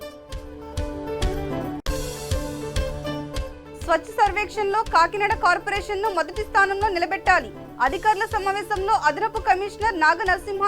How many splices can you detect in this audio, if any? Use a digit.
2